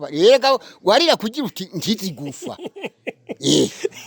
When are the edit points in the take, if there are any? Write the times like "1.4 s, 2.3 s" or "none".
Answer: none